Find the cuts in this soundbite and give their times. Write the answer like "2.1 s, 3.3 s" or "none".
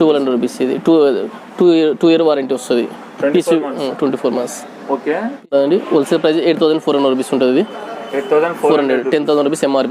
5.5 s